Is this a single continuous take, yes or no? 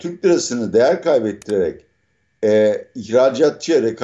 yes